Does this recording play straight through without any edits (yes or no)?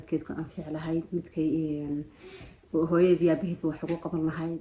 yes